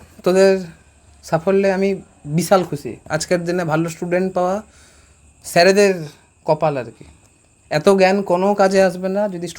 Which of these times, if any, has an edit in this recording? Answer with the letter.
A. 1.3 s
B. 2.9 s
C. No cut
B